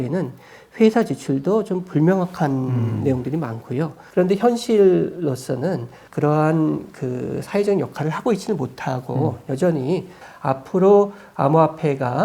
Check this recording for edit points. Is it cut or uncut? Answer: cut